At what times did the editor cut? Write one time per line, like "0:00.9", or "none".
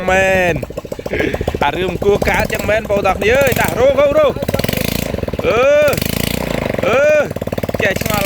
none

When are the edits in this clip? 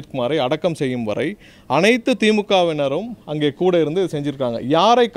none

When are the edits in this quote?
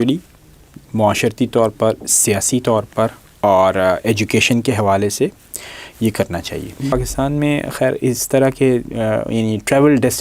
0:06.9

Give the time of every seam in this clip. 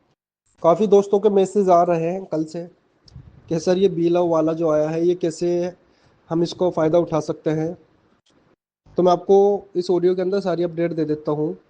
0:04.3

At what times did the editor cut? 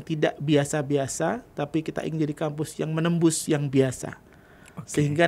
none

